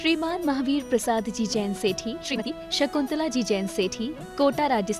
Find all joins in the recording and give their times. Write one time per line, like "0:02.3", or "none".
0:02.3